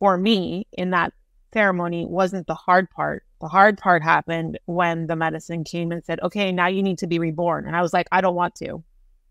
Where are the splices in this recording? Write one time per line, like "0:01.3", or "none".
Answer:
0:03.3